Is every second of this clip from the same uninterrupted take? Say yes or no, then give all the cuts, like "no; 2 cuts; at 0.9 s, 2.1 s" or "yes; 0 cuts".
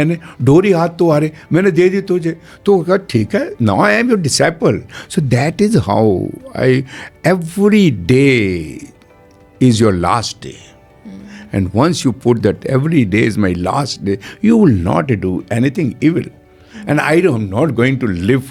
yes; 0 cuts